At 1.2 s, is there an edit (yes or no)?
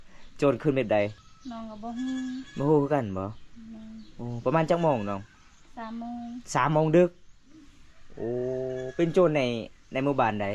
yes